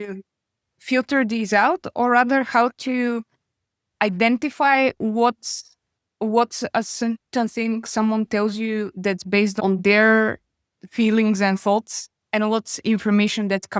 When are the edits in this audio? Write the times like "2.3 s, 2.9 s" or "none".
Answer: none